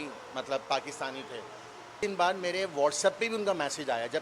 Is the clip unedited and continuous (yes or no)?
no